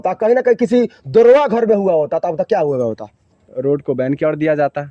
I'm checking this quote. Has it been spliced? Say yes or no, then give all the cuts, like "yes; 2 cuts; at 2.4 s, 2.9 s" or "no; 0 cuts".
no; 0 cuts